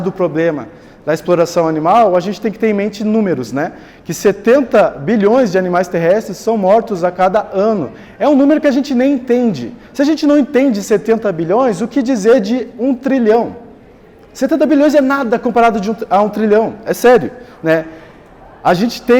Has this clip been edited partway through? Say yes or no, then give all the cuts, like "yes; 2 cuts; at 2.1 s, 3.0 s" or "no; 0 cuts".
no; 0 cuts